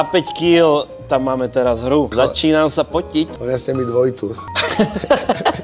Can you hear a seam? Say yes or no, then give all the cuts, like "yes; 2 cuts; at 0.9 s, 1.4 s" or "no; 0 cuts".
yes; 3 cuts; at 2.1 s, 3.4 s, 4.5 s